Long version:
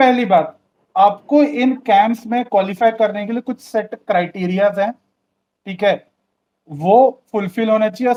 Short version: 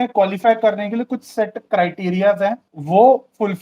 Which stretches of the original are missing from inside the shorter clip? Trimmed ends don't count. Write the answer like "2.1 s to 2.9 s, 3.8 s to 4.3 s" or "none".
5.1 s to 6.6 s